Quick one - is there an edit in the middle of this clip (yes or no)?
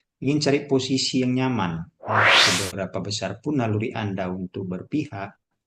yes